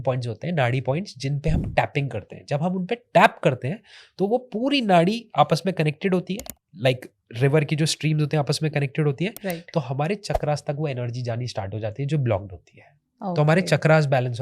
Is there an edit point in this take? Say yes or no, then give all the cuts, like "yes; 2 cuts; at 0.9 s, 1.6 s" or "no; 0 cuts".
no; 0 cuts